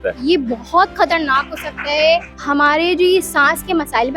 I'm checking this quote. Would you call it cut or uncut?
cut